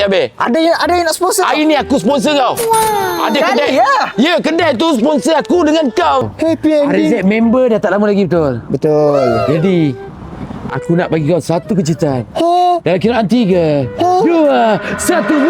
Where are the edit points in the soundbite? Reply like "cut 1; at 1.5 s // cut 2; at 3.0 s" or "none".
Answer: cut 1; at 6.3 s